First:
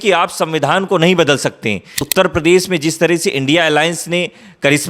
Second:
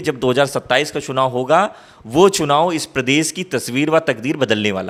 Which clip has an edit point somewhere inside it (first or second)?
first